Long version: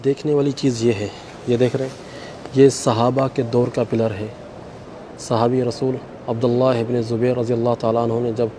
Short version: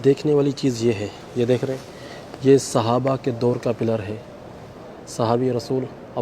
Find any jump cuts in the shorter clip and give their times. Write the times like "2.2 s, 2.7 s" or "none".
1.2 s